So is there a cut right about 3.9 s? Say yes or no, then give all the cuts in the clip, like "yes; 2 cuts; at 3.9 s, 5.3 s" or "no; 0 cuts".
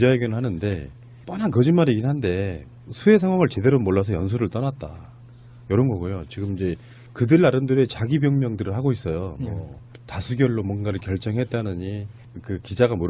no; 1 cut; at 6.6 s